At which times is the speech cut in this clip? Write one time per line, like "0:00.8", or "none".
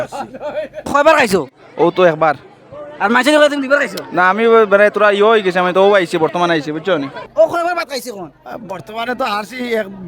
0:00.9
0:07.2